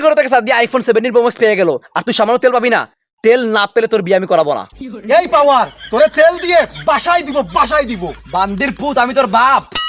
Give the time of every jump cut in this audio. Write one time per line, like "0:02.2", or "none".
none